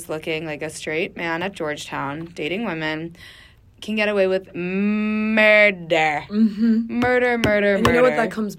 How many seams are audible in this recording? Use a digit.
0